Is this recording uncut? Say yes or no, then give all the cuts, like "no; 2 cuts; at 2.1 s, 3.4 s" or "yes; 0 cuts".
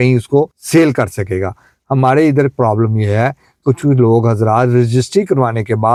yes; 0 cuts